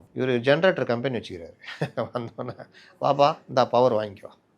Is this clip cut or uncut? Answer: uncut